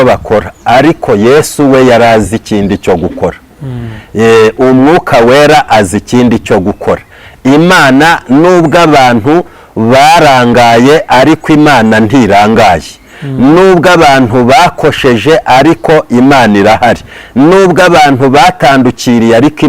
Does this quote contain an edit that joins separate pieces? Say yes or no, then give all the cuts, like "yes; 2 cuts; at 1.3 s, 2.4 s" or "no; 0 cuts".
no; 0 cuts